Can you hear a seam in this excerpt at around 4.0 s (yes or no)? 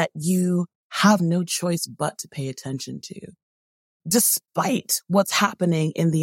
yes